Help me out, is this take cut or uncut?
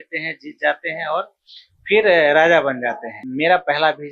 cut